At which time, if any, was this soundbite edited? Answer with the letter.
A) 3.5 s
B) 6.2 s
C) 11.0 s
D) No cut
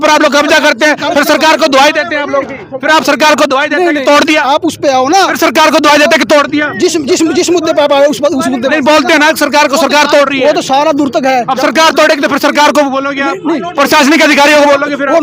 D